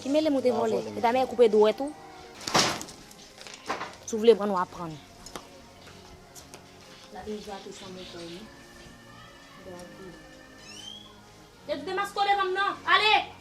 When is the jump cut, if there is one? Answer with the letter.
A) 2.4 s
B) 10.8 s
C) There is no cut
A